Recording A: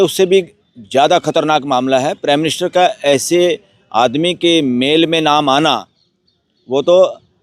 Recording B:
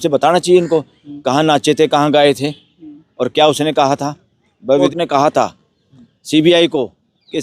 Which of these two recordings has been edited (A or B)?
B